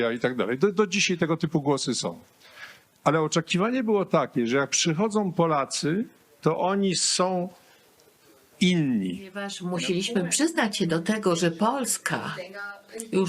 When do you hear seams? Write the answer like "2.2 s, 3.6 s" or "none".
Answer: 9.6 s

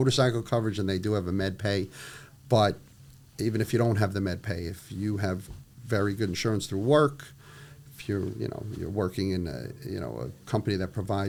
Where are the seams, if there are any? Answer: none

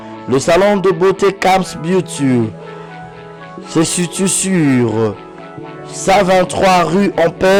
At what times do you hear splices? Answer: none

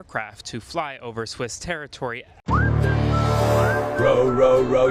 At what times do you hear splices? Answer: 2.3 s

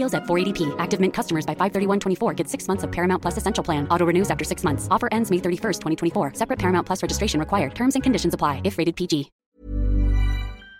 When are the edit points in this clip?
9.4 s

